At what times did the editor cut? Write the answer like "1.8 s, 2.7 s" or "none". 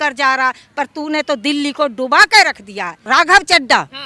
3.0 s